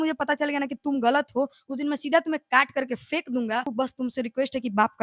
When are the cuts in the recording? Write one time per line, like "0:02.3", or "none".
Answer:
0:03.7

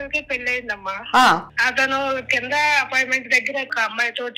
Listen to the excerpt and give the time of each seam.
0:01.5
0:03.7

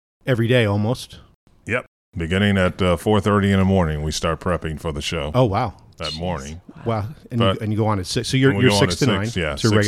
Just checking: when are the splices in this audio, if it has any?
none

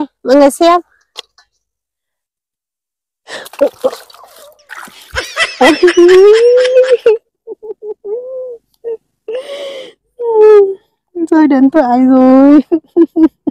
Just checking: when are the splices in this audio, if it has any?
none

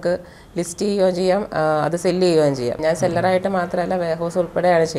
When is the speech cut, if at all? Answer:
0:02.7

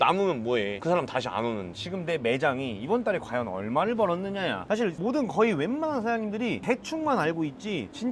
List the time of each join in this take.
0:01.8

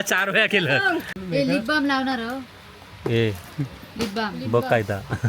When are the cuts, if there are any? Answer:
0:01.1

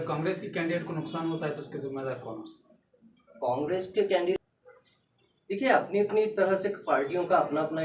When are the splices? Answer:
0:04.4

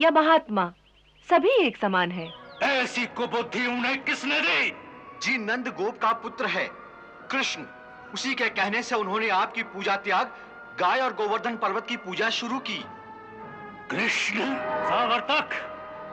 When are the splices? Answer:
0:02.4
0:14.6

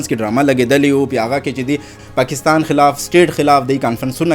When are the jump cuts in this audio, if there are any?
0:01.9

